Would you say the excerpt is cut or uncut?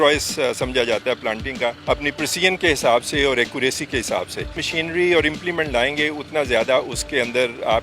cut